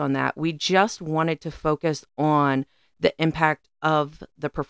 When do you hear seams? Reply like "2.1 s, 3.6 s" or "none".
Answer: none

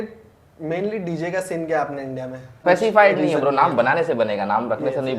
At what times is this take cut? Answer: 2.6 s

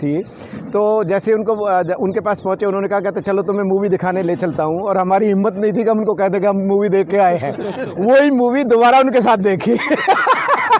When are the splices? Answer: none

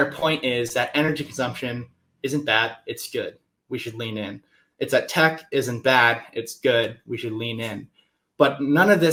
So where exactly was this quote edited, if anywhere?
none

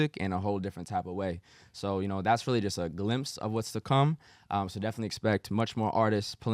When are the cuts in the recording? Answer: none

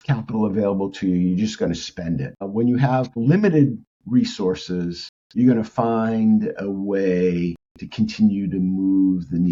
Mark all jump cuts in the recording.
none

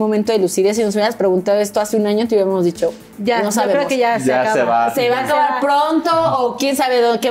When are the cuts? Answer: none

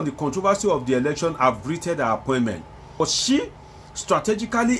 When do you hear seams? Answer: 3.0 s

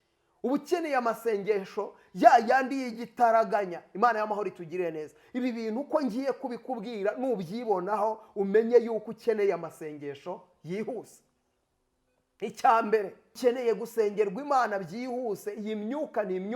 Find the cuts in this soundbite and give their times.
13.3 s

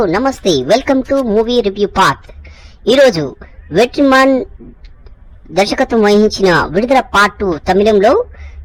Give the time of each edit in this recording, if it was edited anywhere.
none

